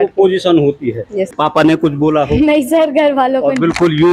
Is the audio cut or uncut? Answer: cut